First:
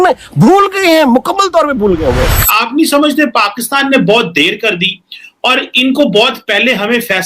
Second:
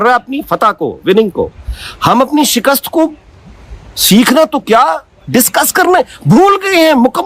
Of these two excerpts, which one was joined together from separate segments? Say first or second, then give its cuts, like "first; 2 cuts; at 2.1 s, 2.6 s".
first; 1 cut; at 2.4 s